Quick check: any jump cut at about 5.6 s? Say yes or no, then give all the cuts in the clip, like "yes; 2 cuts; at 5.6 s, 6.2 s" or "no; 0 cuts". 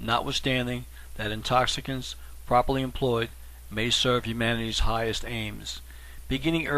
yes; 1 cut; at 5.6 s